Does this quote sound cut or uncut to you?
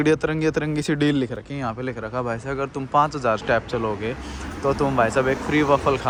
uncut